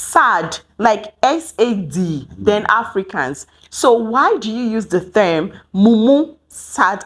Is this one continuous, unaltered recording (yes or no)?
yes